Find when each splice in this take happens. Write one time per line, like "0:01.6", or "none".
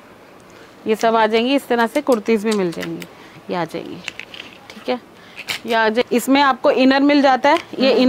0:06.0